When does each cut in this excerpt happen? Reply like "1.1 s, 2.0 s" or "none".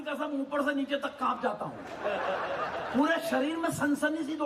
none